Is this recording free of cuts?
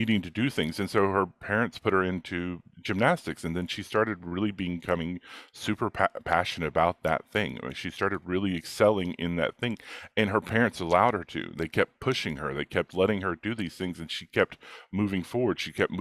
yes; 0 cuts

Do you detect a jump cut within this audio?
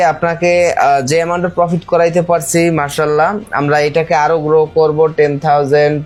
no; 0 cuts

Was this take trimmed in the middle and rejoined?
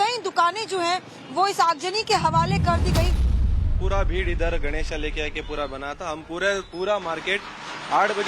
yes; 1 cut; at 4.6 s

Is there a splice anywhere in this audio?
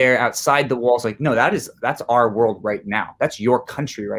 no; 0 cuts

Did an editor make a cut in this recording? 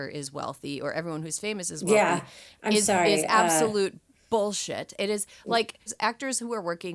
yes; 1 cut; at 5.8 s

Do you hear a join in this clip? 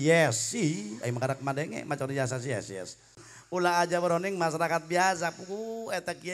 yes; 1 cut; at 3.2 s

